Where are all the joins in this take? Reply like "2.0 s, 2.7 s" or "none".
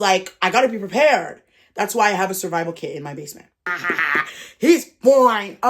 3.8 s